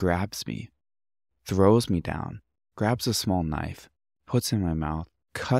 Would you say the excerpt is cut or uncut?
uncut